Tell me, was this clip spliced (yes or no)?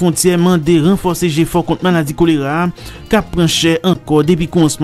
no